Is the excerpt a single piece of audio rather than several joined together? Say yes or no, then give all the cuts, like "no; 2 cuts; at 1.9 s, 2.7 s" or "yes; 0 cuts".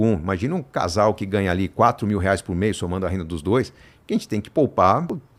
yes; 0 cuts